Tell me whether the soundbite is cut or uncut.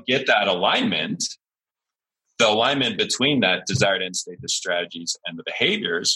uncut